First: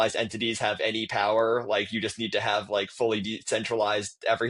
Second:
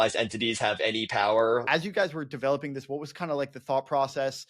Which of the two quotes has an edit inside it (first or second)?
second